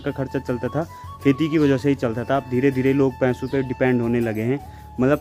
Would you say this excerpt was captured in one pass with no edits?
yes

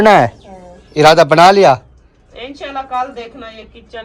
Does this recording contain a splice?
no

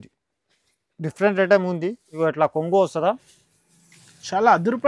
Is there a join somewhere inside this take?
yes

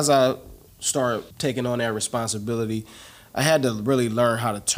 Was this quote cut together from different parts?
yes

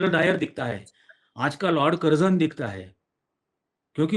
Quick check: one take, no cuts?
yes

